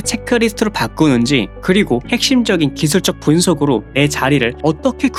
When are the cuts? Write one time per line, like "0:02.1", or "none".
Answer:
none